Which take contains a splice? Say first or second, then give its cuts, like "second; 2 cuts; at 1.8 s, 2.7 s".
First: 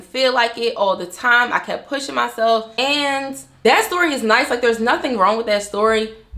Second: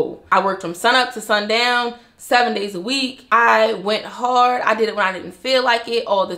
first; 1 cut; at 2.7 s